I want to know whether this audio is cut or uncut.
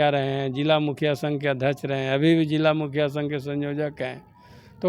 uncut